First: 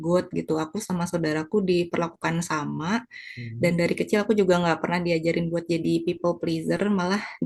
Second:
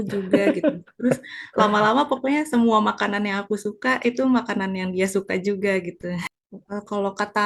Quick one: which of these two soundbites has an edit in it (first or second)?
second